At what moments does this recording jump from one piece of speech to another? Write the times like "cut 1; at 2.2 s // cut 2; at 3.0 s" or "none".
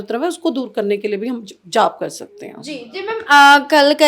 none